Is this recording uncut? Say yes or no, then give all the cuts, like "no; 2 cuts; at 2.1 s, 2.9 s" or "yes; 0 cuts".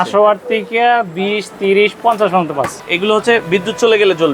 no; 1 cut; at 2.8 s